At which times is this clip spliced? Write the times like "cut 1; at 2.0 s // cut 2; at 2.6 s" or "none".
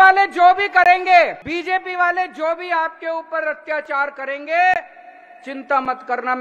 cut 1; at 1.4 s